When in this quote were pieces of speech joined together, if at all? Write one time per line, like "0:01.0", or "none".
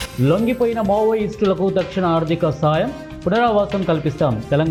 none